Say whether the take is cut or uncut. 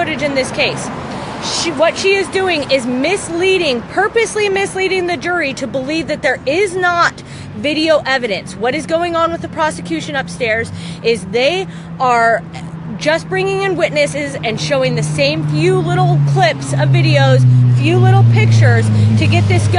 uncut